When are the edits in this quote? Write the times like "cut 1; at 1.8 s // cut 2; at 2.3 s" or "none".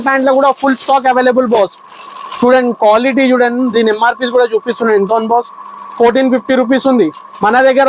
none